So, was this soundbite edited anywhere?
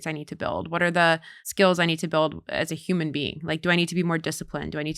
yes; 1 cut; at 1.4 s

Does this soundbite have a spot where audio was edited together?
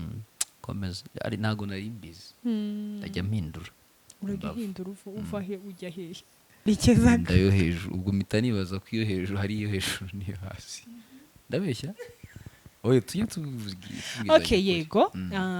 yes; 1 cut; at 6.6 s

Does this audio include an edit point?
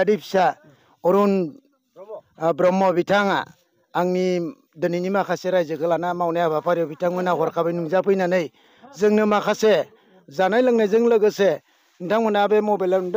no; 0 cuts

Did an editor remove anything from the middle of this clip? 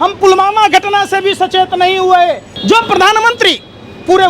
yes; 1 cut; at 2.5 s

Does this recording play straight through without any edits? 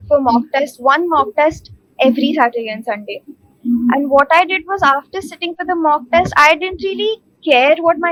yes; 0 cuts

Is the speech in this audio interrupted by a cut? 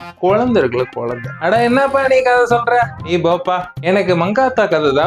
no; 0 cuts

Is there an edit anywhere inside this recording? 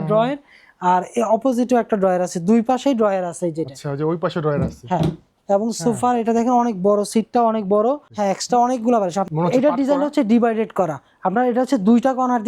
no; 0 cuts

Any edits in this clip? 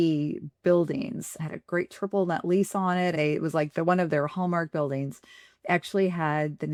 no; 0 cuts

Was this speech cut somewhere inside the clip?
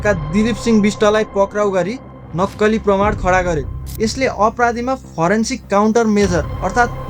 yes; 1 cut; at 3.8 s

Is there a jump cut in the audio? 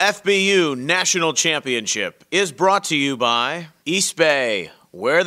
yes; 1 cut; at 3.7 s

